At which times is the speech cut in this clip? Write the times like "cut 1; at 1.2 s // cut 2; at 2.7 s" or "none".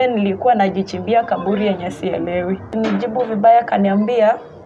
cut 1; at 2.9 s